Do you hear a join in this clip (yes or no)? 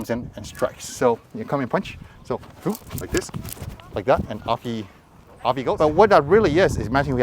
yes